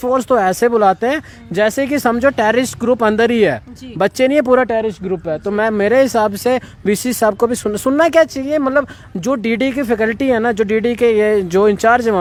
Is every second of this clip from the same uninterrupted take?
yes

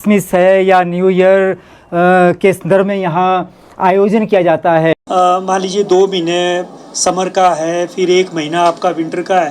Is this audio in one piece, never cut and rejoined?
no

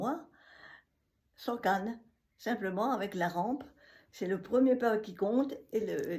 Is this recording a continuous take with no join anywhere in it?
yes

